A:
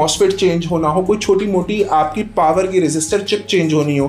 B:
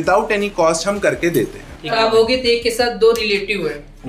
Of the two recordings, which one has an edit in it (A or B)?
B